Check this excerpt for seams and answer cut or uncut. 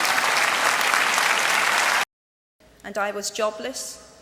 cut